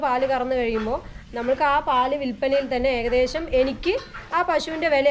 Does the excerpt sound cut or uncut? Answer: uncut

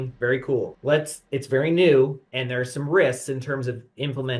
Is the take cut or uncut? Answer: uncut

